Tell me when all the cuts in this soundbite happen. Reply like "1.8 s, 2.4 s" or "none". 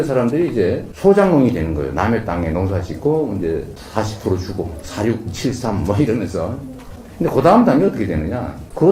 none

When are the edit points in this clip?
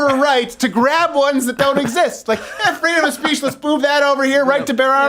none

